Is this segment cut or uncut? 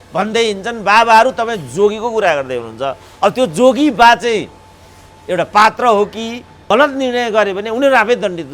cut